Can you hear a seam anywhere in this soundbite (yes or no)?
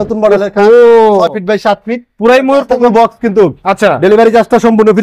yes